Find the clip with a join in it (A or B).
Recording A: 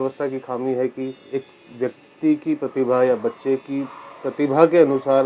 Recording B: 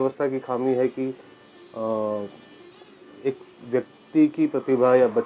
A